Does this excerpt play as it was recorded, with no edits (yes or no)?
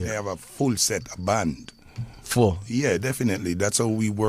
yes